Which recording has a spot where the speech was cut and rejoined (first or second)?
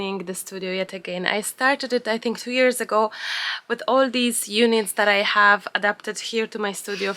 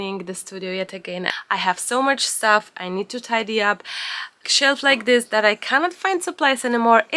second